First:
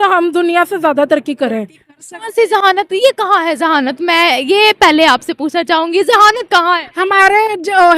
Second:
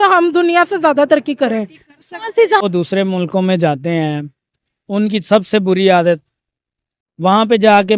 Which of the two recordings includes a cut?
second; 1 cut; at 2.6 s

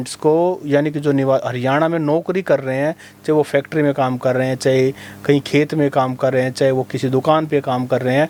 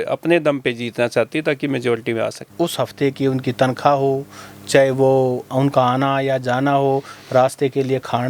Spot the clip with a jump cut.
second; 1 cut; at 2.5 s

